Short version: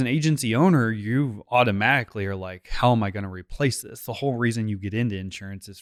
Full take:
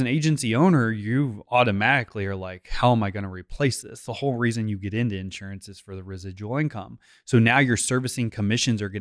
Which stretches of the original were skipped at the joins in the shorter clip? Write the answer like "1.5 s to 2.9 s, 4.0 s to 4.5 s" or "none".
none